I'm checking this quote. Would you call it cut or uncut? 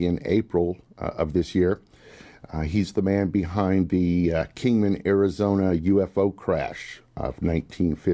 cut